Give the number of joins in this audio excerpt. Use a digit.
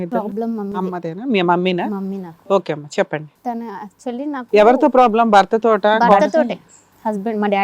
1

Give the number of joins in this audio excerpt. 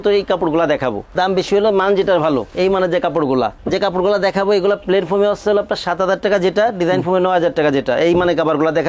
0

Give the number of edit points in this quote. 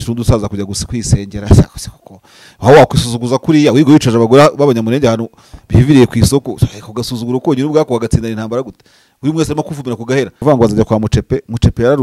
1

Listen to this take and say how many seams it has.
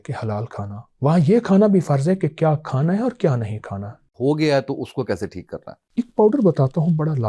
1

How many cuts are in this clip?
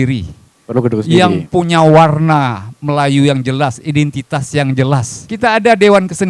1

